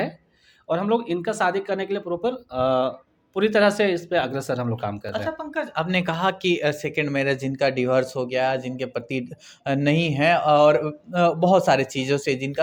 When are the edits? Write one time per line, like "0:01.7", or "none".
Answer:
none